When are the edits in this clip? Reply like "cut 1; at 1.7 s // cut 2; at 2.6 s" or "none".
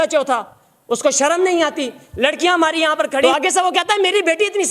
cut 1; at 3.2 s